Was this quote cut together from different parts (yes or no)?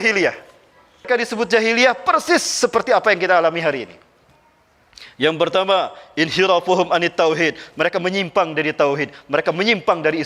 yes